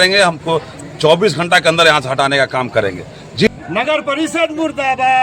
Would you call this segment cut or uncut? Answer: cut